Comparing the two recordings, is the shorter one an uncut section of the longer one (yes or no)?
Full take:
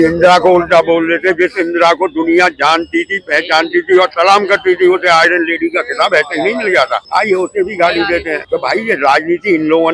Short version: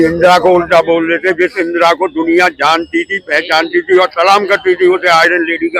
yes